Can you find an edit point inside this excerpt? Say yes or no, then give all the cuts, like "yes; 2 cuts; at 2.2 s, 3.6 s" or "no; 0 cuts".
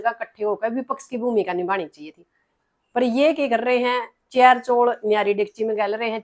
no; 0 cuts